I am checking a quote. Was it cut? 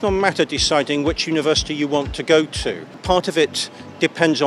yes; 1 cut; at 3.0 s

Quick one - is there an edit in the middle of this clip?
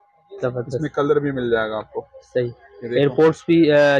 no; 0 cuts

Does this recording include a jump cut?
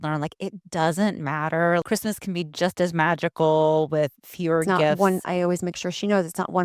yes; 2 cuts; at 1.8 s, 5.0 s

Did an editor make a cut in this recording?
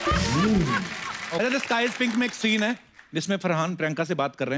yes; 1 cut; at 1.4 s

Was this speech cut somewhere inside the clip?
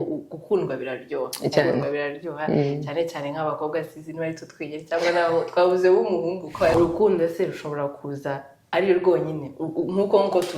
yes; 1 cut; at 6.7 s

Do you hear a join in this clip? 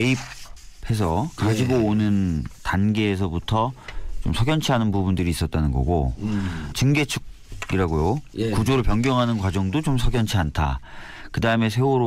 no; 0 cuts

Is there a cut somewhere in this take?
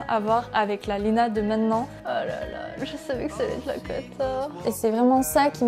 yes; 2 cuts; at 2.0 s, 4.7 s

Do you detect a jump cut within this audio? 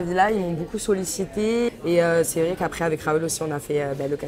yes; 1 cut; at 1.7 s

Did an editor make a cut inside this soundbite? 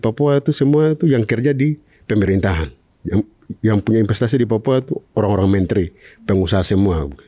no; 0 cuts

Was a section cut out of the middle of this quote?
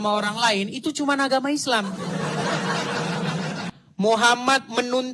yes; 1 cut; at 3.8 s

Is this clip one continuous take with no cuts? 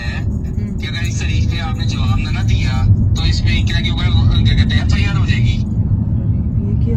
yes; 0 cuts

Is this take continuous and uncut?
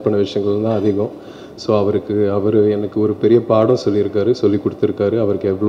yes; 0 cuts

